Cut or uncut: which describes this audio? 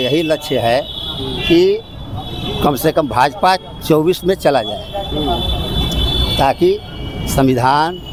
uncut